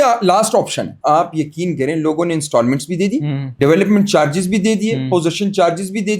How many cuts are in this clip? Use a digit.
1